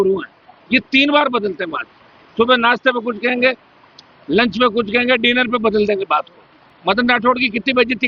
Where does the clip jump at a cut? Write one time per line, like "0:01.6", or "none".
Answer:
none